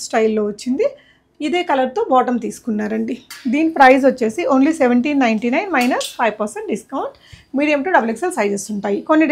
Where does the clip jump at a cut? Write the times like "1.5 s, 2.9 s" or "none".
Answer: none